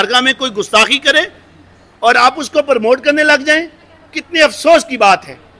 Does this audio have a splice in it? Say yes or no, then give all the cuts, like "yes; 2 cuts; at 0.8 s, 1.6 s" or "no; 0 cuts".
no; 0 cuts